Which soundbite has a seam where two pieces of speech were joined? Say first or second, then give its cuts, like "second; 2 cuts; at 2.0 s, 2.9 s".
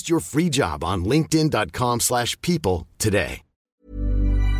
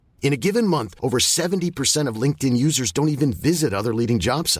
first; 1 cut; at 3.6 s